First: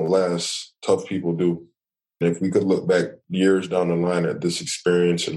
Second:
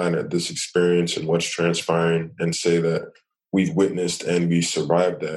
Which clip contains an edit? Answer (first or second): first